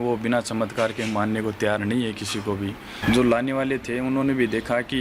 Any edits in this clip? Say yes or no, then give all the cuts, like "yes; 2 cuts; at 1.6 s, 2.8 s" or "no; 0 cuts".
yes; 1 cut; at 2.9 s